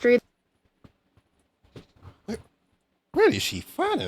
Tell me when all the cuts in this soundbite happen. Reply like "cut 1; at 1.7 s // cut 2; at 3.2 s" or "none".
none

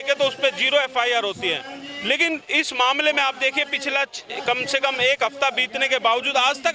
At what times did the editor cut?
none

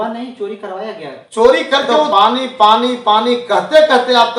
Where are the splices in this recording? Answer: cut 1; at 2.1 s

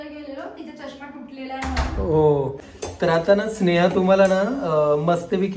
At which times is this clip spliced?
cut 1; at 2.6 s

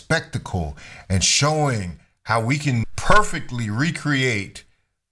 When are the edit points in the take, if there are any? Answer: cut 1; at 2.9 s

